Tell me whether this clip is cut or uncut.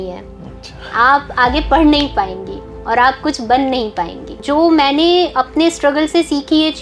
cut